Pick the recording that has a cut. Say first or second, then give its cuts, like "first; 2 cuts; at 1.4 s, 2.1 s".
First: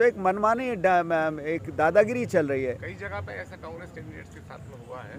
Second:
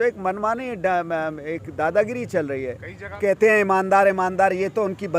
second; 1 cut; at 3.2 s